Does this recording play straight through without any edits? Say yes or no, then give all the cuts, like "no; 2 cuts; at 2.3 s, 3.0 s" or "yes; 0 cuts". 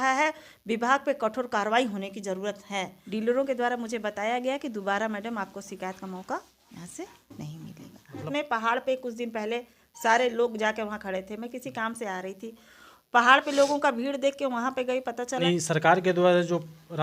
no; 3 cuts; at 3.0 s, 8.3 s, 15.4 s